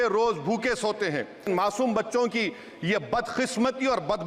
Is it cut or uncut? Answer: cut